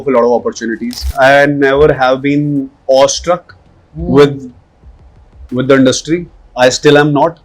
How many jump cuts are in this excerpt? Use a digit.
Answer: 2